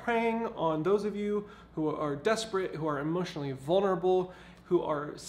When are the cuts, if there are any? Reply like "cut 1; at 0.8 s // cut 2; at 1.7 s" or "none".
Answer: none

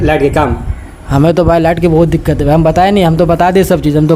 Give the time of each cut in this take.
none

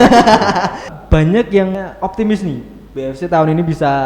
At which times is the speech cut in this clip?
cut 1; at 0.9 s // cut 2; at 1.8 s

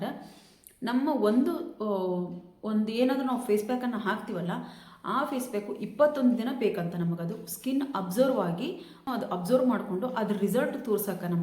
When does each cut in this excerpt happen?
cut 1; at 9.1 s

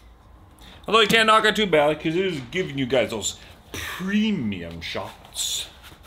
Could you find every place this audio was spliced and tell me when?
none

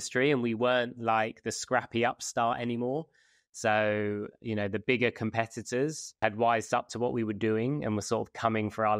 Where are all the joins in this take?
none

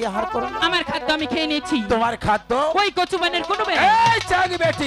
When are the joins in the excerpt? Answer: none

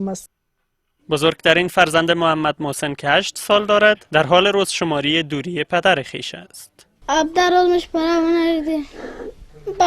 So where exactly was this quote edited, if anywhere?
cut 1; at 3.3 s

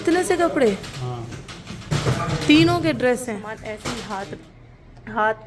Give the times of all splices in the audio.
cut 1; at 3.7 s

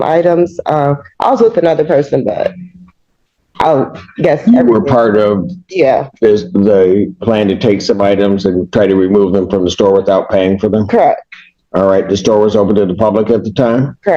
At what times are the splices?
none

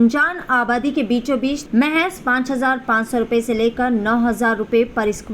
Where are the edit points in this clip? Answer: cut 1; at 1.6 s

